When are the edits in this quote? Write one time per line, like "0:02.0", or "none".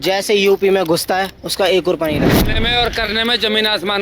0:01.4
0:02.5

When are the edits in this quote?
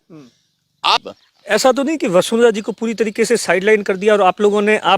0:01.0

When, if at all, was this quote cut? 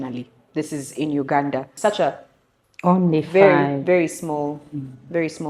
0:01.7

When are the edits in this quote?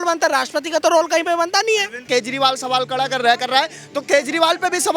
0:02.0

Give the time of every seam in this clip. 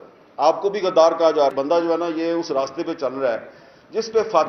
0:01.5

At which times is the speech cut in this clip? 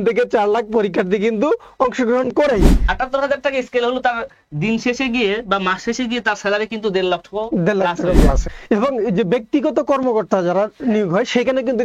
0:02.8
0:08.5

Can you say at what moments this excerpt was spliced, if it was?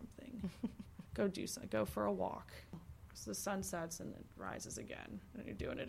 0:02.7

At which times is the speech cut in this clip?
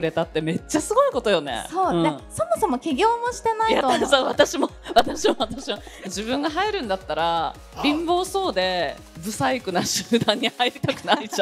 0:06.0
0:09.0

